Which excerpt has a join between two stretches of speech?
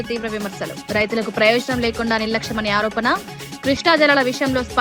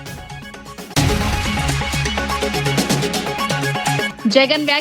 second; 3 cuts; at 0.9 s, 2.3 s, 3.7 s

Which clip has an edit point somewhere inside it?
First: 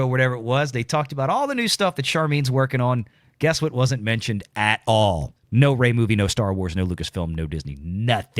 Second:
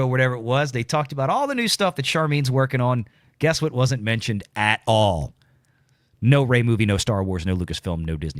first; 1 cut; at 5.3 s

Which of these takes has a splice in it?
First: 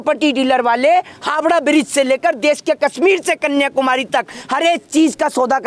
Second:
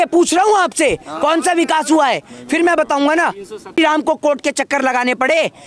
second; 1 cut; at 3.8 s

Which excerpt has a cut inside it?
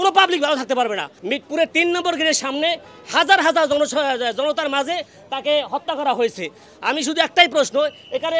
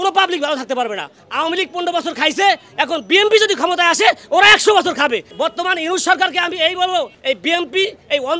second; 3 cuts; at 1.2 s, 5.3 s, 7.1 s

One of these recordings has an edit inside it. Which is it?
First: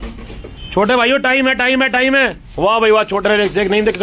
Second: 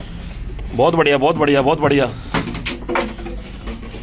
first; 1 cut; at 2.4 s

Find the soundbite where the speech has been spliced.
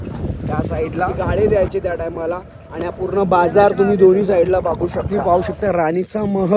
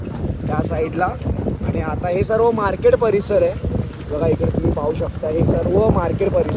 first; 2 cuts; at 1.1 s, 5.2 s

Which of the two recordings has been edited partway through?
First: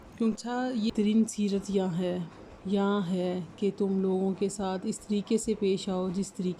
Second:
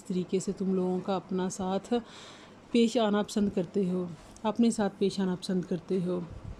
first; 1 cut; at 0.9 s

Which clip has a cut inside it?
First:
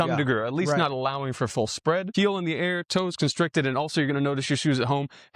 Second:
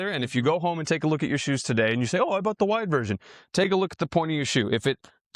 first; 1 cut; at 2.1 s

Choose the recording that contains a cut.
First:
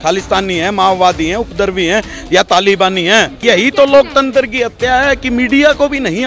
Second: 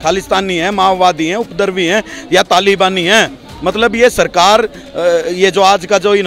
first; 1 cut; at 3.4 s

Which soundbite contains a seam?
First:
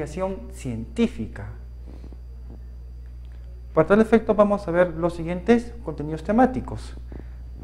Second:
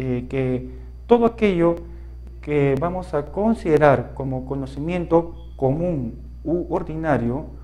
first; 1 cut; at 4.5 s

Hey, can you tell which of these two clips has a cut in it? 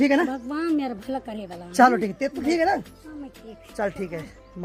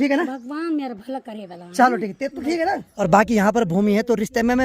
second; 1 cut; at 2.9 s

